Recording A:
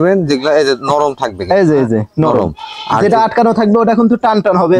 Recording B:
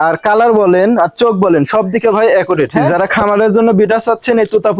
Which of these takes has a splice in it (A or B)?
B